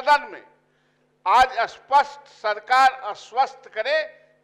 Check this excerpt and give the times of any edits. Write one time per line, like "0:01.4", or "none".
none